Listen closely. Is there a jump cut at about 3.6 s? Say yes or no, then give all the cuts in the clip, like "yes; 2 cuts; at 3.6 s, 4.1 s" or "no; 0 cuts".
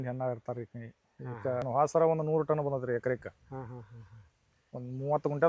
no; 1 cut; at 1.6 s